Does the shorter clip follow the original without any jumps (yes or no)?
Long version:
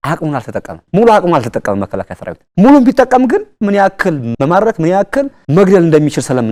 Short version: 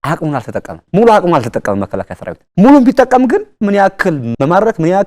yes